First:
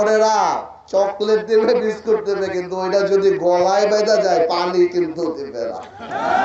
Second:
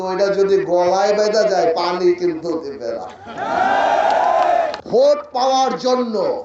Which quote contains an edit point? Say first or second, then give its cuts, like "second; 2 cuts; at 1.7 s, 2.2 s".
second; 1 cut; at 4.7 s